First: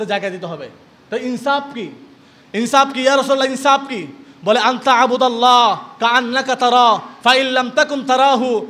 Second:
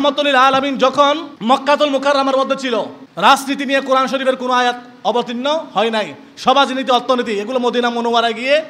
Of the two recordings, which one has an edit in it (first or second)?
second